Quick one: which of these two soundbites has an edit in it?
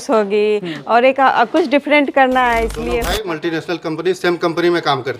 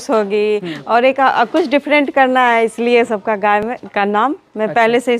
first; 1 cut; at 3.0 s

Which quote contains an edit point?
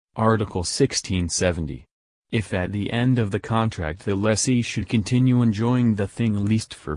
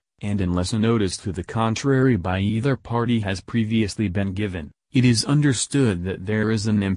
first; 1 cut; at 1.0 s

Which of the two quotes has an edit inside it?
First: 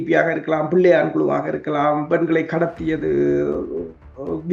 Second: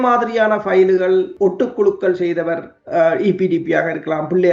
second; 1 cut; at 1.3 s

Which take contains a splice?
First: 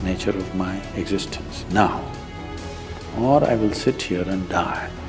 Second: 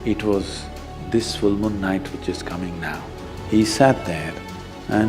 second; 1 cut; at 3.3 s

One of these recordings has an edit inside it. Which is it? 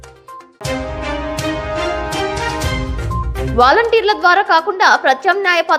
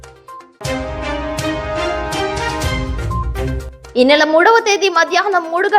second; 1 cut; at 3.5 s

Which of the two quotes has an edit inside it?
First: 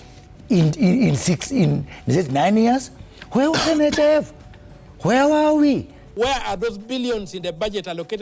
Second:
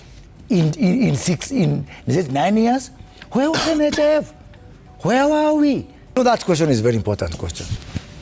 first; 1 cut; at 6.0 s

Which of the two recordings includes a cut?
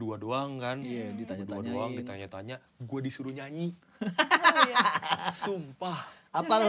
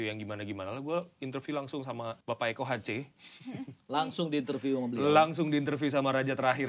second; 1 cut; at 2.2 s

